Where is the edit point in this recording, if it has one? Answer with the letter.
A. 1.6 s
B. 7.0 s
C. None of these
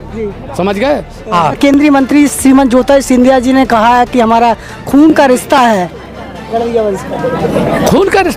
A